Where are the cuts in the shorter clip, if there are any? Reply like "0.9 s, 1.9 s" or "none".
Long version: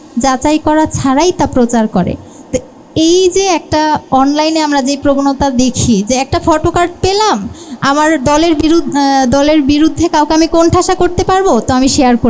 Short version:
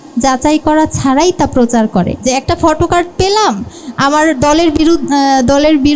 2.2 s